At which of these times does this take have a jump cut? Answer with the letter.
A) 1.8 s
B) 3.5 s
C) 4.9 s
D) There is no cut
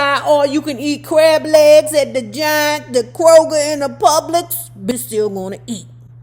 C